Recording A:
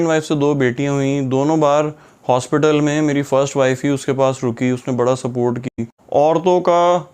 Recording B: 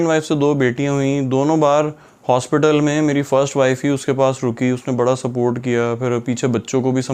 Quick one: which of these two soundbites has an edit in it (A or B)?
A